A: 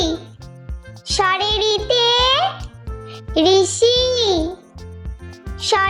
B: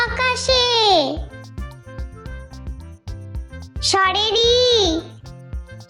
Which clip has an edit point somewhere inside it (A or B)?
B